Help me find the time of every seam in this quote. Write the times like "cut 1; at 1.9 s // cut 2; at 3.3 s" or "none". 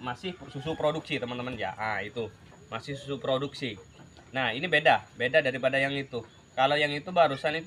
none